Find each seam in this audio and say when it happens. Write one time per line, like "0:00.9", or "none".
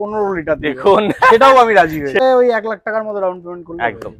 0:02.2